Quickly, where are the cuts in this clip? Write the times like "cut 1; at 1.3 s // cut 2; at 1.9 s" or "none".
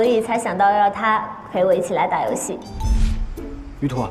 cut 1; at 2.7 s